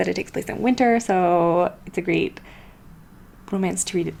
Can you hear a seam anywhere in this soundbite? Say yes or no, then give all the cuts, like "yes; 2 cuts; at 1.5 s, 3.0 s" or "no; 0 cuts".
no; 0 cuts